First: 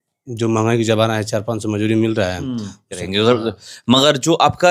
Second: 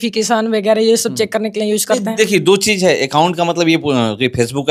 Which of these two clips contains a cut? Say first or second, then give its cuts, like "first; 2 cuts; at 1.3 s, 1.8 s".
first; 1 cut; at 3.0 s